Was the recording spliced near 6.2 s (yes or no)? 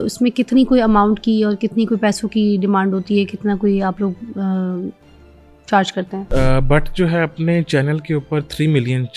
yes